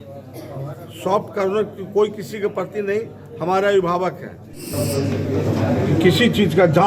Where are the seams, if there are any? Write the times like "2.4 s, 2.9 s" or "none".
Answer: 4.7 s